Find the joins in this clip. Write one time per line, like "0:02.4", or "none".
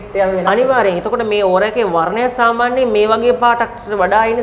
none